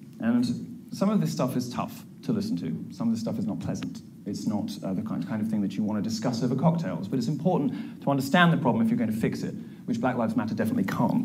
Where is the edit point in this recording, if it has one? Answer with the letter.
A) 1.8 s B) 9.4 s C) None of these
A